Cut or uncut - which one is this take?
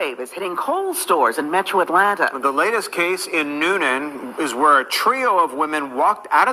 cut